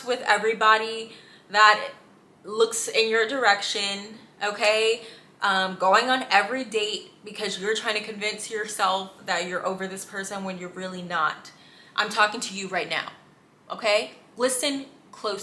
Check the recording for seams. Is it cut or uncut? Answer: uncut